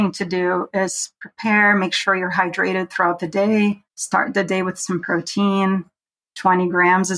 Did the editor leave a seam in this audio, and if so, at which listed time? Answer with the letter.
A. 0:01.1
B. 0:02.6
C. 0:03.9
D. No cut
C